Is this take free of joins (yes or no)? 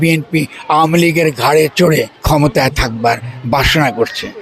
no